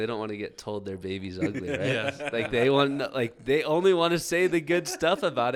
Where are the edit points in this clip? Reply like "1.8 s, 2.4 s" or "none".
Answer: none